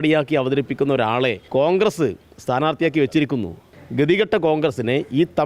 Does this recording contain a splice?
yes; 2 cuts; at 1.4 s, 3.7 s

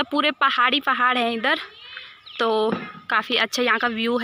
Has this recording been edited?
no; 0 cuts

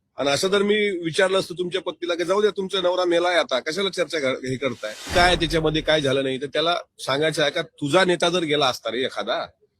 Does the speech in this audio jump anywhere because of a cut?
yes; 1 cut; at 4.9 s

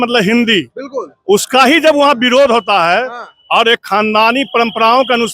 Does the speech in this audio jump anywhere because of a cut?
no; 0 cuts

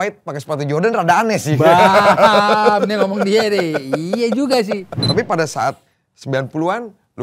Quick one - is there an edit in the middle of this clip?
yes; 1 cut; at 5.0 s

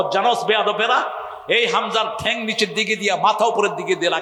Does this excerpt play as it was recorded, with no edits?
yes; 0 cuts

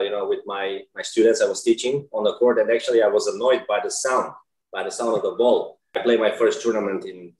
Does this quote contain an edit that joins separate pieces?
yes; 1 cut; at 5.8 s

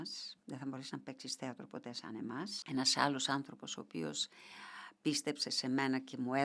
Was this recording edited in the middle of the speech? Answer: yes; 1 cut; at 2.5 s

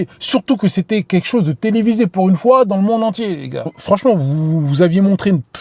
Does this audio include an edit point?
yes; 1 cut; at 3.8 s

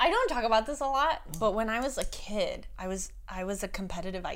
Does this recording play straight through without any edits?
no; 1 cut; at 1.3 s

